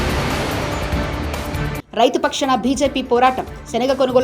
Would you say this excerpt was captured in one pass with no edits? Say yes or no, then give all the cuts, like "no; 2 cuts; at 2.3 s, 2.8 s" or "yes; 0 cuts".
yes; 0 cuts